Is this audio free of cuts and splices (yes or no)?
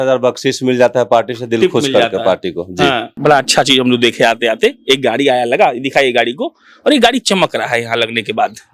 no